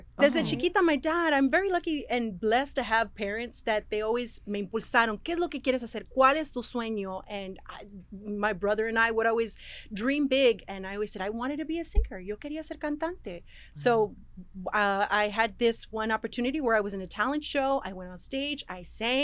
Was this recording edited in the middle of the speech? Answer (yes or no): no